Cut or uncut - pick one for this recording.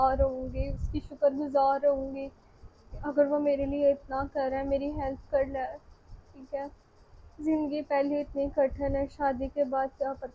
uncut